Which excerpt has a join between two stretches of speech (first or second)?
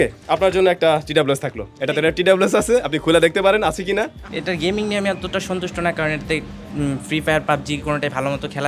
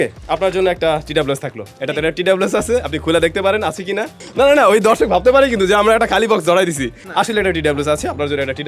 first